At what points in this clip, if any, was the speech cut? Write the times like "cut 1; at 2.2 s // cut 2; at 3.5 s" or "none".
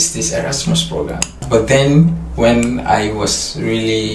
cut 1; at 1.4 s